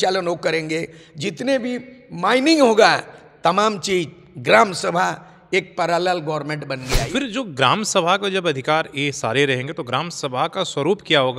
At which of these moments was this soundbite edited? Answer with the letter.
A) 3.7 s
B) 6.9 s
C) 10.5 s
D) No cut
B